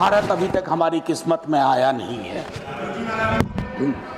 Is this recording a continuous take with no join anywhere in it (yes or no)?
yes